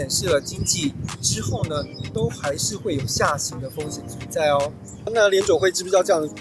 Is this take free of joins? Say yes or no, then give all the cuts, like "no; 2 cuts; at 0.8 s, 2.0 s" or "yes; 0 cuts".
no; 1 cut; at 5.1 s